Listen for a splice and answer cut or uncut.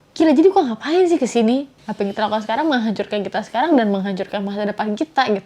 cut